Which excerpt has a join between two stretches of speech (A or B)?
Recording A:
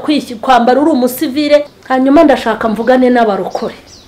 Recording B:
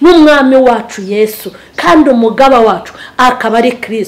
A